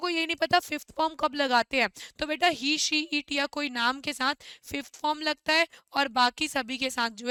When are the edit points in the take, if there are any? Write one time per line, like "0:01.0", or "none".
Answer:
none